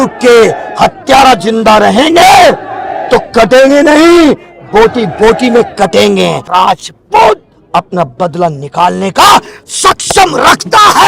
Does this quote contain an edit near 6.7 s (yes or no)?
yes